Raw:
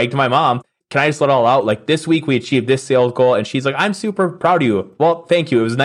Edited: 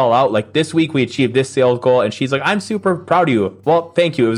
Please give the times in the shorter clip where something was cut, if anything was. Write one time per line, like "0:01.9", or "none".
none